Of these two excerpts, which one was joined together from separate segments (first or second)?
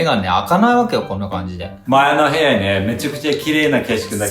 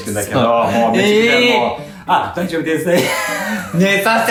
first